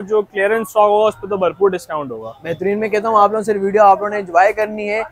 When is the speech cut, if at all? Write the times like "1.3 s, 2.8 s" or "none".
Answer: none